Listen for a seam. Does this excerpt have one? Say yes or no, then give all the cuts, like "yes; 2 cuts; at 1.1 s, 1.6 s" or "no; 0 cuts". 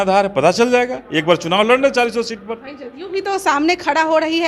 no; 0 cuts